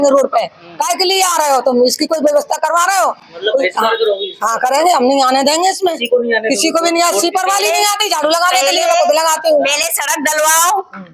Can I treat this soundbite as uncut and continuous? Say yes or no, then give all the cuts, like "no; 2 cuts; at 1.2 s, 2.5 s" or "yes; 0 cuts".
yes; 0 cuts